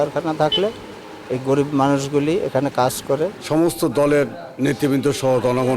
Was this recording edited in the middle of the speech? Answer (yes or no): yes